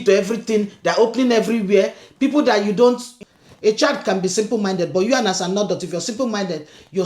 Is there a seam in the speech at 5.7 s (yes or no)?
no